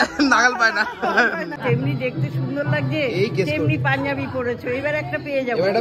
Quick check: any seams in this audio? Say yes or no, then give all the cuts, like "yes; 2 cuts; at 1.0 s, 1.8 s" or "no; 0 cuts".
yes; 1 cut; at 1.6 s